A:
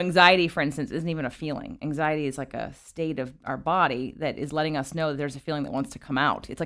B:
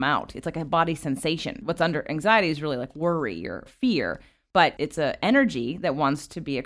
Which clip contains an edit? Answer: B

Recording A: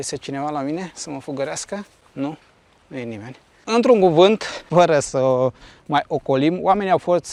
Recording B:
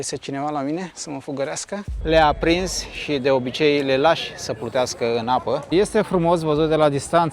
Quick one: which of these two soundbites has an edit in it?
B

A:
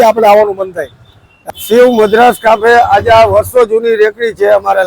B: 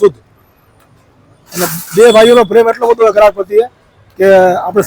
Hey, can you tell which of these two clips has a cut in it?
A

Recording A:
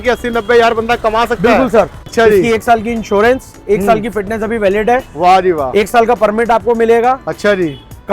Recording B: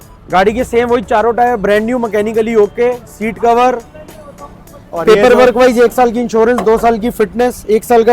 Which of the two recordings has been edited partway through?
A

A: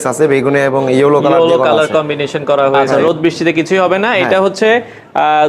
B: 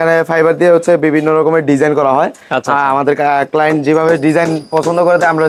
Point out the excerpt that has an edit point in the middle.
A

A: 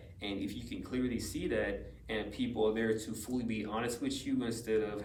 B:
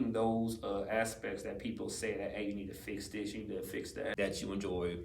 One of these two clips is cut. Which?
B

